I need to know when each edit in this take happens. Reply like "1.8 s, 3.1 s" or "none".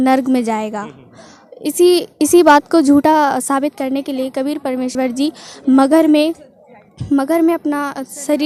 none